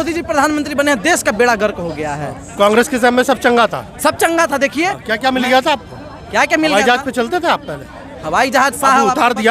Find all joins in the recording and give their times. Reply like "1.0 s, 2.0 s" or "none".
none